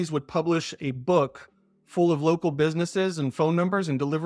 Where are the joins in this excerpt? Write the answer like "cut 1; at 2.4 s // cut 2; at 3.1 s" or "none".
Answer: none